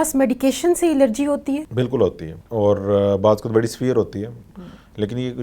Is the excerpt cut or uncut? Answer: cut